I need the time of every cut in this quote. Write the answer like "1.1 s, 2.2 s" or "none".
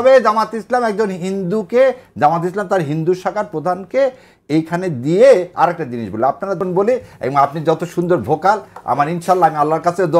6.6 s